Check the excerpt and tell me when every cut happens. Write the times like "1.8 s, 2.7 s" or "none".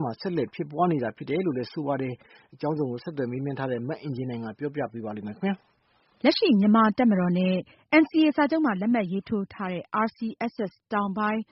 1.7 s